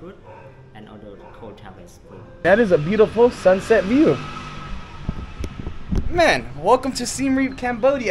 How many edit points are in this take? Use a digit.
1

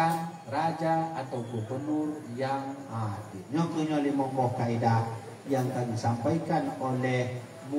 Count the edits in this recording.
1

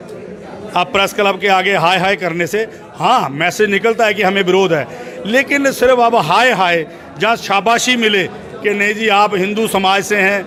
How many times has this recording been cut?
0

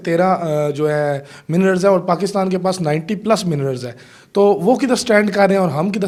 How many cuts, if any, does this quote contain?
0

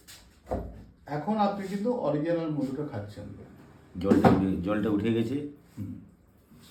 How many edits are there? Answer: 0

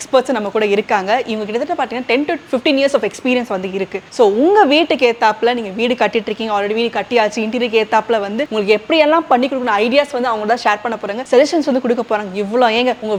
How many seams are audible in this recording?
0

